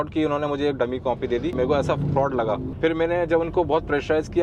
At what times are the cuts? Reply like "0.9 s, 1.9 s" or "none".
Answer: 1.6 s, 2.7 s